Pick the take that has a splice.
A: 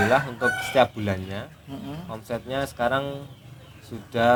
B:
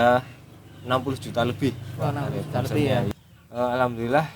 B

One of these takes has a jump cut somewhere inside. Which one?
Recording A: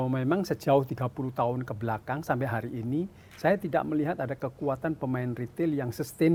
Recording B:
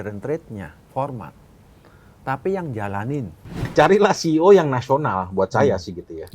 B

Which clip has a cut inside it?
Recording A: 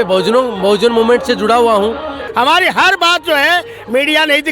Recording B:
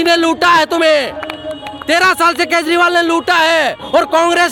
A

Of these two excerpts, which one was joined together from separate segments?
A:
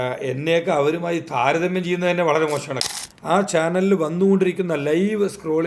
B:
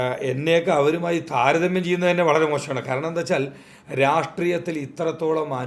A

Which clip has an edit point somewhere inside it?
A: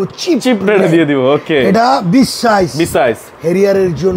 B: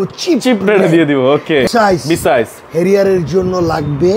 B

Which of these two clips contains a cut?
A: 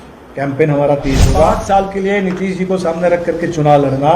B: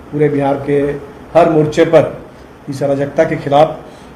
A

